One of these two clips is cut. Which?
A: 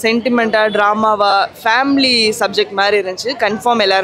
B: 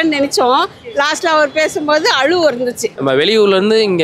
B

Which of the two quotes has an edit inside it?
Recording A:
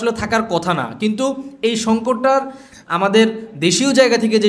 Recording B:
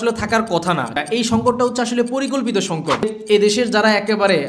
B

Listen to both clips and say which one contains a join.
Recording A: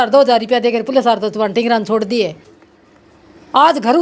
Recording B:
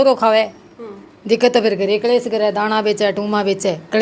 A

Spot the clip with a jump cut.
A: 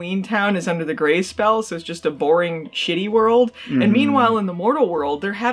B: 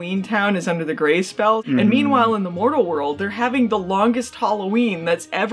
B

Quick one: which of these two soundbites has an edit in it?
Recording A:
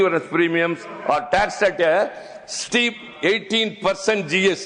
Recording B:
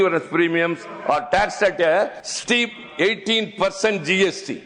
B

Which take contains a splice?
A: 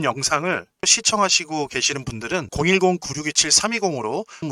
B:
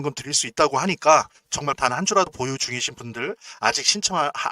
B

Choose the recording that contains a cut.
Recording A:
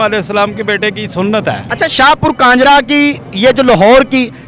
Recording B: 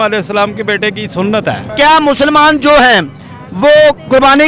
B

